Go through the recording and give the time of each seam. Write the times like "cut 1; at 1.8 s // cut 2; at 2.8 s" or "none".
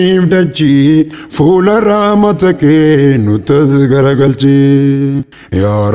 cut 1; at 1.2 s